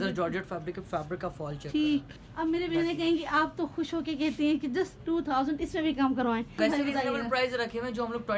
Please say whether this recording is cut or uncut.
cut